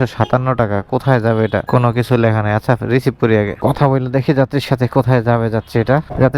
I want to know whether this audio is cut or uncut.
uncut